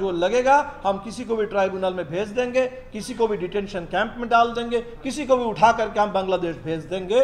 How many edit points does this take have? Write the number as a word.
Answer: zero